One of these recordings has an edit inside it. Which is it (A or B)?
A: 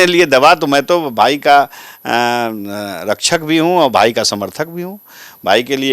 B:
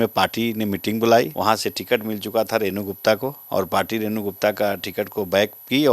B